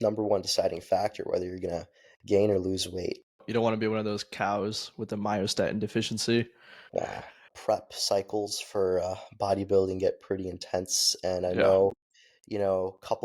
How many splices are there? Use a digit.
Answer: 2